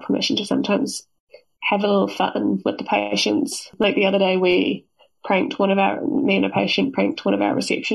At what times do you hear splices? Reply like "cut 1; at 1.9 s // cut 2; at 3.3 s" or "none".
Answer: none